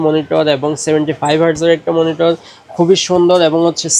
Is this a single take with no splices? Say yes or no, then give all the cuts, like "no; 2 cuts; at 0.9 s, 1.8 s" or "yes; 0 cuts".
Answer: yes; 0 cuts